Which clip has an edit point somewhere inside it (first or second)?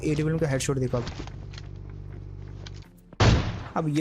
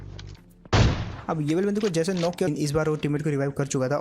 second